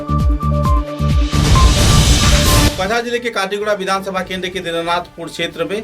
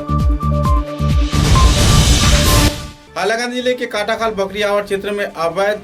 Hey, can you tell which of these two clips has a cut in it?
first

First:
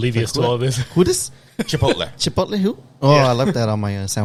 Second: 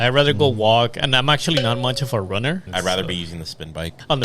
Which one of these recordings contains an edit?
second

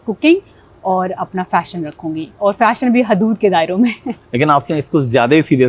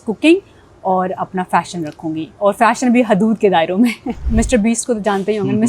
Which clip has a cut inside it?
second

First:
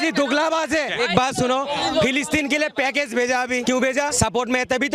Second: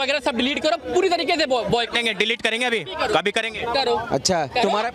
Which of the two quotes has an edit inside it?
first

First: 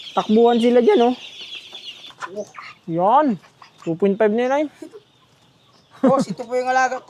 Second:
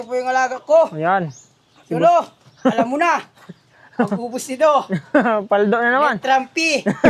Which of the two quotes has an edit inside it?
first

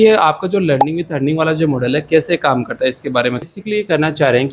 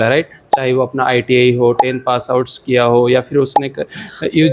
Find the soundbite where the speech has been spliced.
first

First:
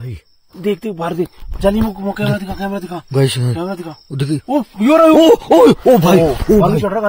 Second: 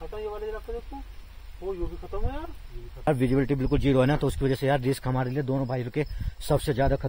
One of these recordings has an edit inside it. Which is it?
second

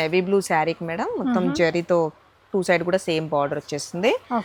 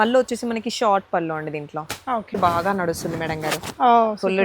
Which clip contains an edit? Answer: second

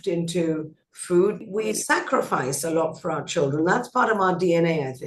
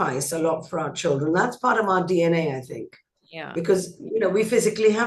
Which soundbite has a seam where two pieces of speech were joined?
first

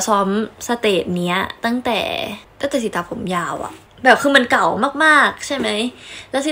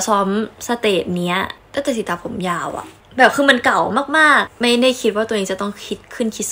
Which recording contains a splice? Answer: second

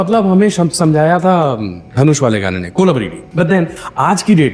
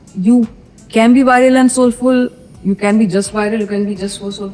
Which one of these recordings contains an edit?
first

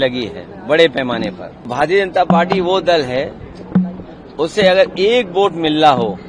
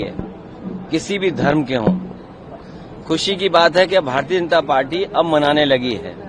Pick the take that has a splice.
first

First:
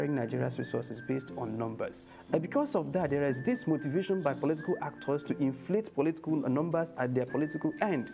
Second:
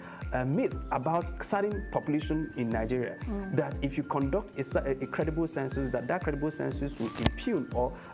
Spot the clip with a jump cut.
first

